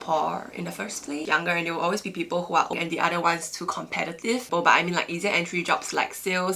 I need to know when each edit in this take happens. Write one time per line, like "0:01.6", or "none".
0:01.2
0:02.7
0:04.4